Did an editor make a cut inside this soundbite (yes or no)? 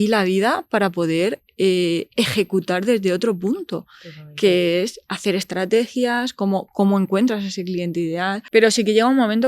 yes